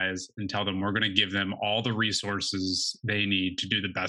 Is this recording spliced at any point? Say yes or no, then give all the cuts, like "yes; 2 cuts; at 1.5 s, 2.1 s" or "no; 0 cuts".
no; 0 cuts